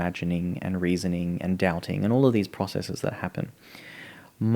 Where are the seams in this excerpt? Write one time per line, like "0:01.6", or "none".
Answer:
none

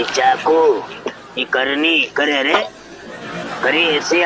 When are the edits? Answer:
0:02.6

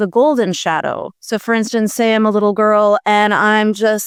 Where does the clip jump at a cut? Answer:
none

